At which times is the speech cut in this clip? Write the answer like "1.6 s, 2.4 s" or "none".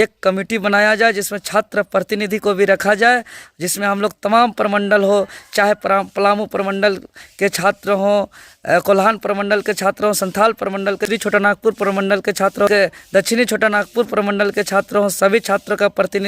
11.1 s, 12.7 s